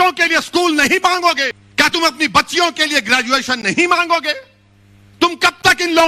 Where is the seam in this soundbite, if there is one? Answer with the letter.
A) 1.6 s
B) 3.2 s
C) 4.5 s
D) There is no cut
A